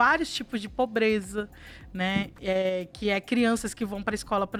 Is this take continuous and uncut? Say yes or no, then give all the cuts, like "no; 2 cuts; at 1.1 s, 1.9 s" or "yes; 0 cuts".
yes; 0 cuts